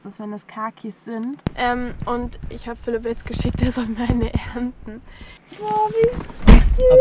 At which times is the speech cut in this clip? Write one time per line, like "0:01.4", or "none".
0:01.4
0:05.4